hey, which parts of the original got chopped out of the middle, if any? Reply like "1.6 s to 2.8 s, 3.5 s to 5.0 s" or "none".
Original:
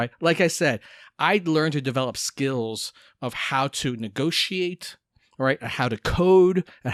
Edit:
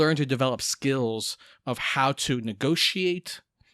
none